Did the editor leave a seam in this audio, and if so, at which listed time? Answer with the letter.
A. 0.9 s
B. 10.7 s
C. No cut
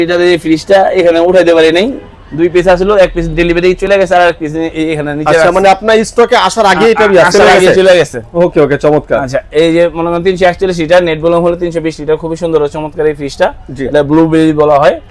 C